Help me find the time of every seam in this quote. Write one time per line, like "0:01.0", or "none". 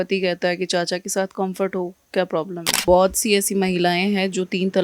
0:02.8